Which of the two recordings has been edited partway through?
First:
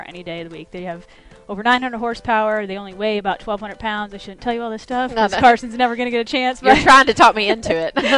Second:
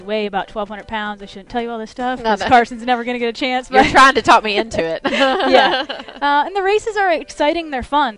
second; 1 cut; at 7.2 s

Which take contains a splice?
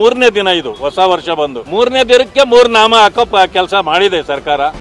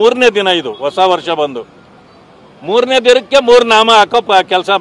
first; 1 cut; at 1.6 s

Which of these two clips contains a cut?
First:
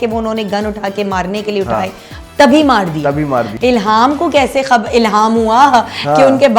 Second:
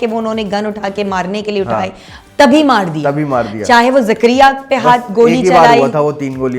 first; 1 cut; at 3.5 s

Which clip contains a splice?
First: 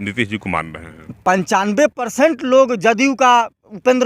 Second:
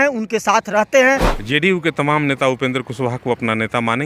second; 1 cut; at 1.4 s

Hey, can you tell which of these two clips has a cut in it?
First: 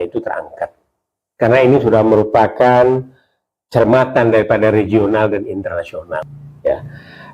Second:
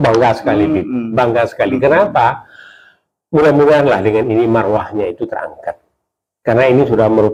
first; 1 cut; at 6.2 s

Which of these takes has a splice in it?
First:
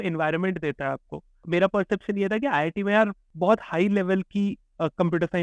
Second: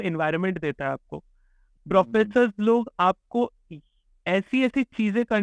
first; 2 cuts; at 1.4 s, 3.2 s

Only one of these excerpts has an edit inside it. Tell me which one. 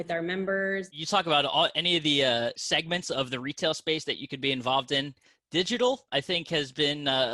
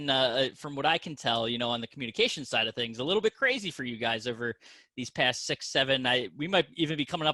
first; 3 cuts; at 0.9 s, 2.6 s, 6.0 s

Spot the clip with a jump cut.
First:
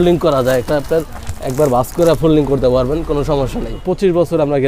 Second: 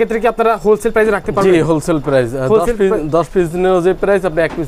first; 1 cut; at 3.8 s

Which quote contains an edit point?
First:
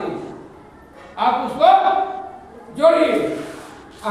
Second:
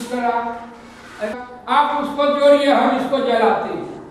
second; 1 cut; at 1.4 s

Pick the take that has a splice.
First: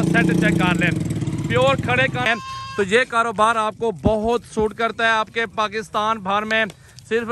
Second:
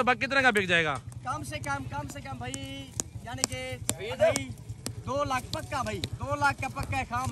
first; 1 cut; at 2.3 s

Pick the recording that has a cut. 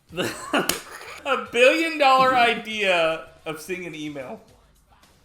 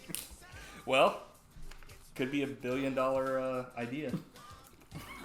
first; 1 cut; at 1.1 s

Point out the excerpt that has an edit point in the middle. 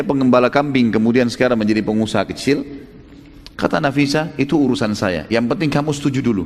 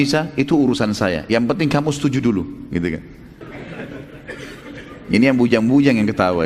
second; 1 cut; at 3.4 s

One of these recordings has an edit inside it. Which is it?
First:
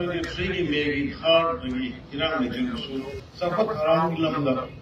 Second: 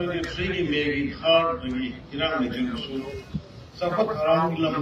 first; 1 cut; at 3.2 s

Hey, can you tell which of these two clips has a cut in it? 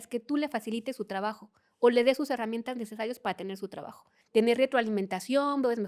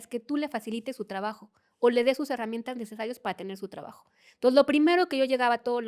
first; 1 cut; at 4.2 s

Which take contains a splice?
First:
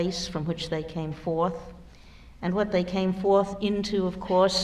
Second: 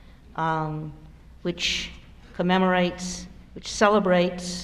first; 1 cut; at 2.7 s

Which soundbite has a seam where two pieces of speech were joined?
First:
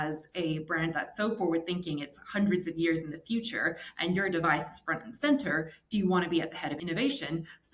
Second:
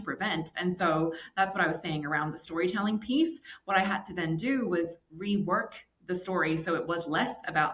first; 1 cut; at 6.7 s

